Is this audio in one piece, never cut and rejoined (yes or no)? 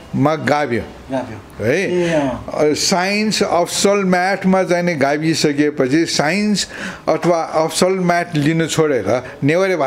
yes